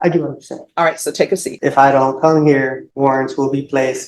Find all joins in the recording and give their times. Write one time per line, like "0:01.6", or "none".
0:01.5
0:02.8